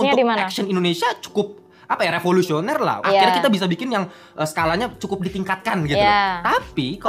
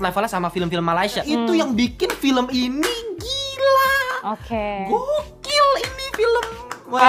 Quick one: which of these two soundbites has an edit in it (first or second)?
second